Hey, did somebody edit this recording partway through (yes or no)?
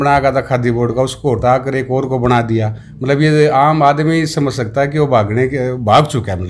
no